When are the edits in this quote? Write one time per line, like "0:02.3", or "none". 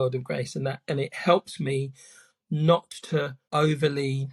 0:03.4